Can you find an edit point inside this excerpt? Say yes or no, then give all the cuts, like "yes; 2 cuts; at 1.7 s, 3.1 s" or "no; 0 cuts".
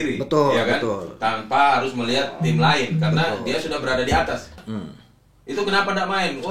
yes; 1 cut; at 4.6 s